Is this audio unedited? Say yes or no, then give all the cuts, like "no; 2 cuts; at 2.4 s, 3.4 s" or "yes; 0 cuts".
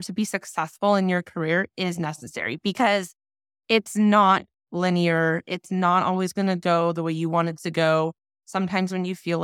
yes; 0 cuts